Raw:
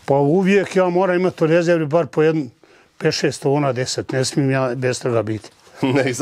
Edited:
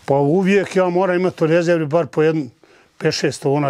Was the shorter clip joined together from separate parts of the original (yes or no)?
no